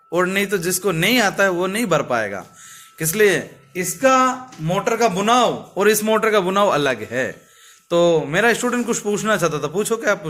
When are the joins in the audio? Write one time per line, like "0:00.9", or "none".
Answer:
none